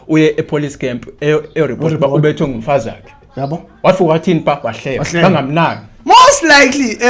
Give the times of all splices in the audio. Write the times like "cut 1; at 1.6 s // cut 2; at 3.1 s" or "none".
none